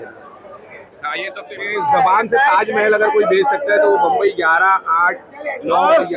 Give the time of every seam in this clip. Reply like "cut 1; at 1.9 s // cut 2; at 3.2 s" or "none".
cut 1; at 1.4 s

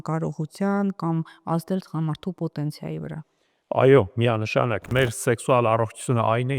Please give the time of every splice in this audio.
cut 1; at 4.9 s

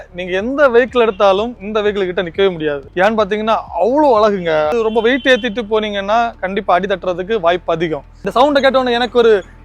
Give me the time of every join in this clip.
cut 1; at 2.8 s // cut 2; at 4.7 s // cut 3; at 8.2 s

